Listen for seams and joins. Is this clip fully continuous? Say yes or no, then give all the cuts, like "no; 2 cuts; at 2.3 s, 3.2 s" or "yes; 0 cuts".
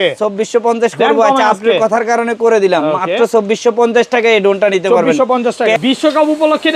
no; 1 cut; at 5.8 s